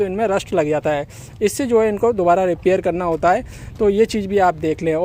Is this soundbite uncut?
yes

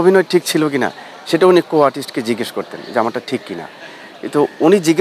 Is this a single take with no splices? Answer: yes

